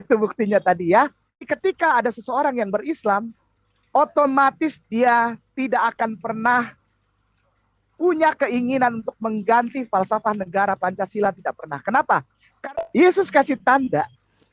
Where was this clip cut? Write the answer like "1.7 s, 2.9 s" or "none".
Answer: 1.5 s, 12.7 s